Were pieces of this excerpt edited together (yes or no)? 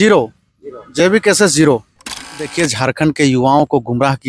yes